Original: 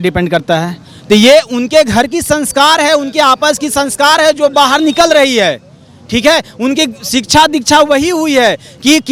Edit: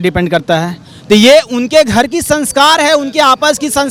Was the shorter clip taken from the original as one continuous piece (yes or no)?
yes